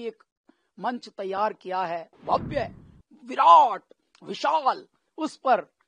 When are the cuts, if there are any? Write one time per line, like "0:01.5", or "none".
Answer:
0:02.1